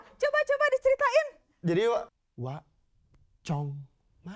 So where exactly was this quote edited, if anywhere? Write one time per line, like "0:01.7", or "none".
0:02.1